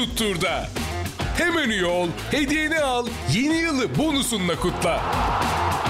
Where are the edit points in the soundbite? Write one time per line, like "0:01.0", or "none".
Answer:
none